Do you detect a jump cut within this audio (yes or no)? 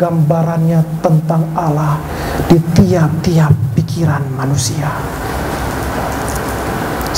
no